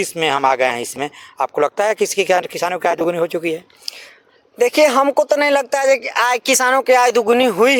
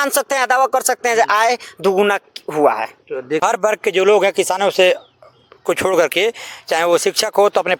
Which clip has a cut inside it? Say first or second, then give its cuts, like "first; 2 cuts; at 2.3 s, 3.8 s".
second; 1 cut; at 3.4 s